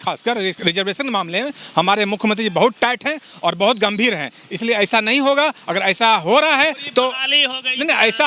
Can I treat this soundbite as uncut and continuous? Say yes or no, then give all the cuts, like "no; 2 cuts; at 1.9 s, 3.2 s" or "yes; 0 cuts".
yes; 0 cuts